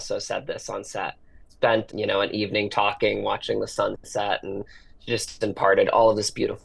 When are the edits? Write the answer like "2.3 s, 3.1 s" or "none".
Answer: none